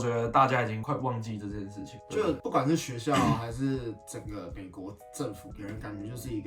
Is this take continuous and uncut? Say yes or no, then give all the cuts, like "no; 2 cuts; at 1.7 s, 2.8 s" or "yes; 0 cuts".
yes; 0 cuts